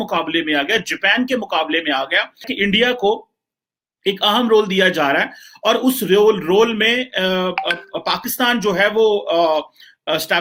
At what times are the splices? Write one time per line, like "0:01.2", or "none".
none